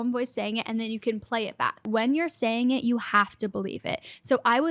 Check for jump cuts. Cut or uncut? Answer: cut